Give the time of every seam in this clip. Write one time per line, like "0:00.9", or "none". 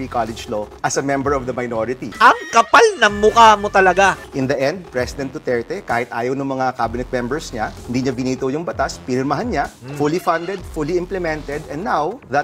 0:02.1
0:04.3